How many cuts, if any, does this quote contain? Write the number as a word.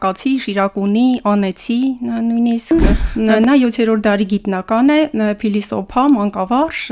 one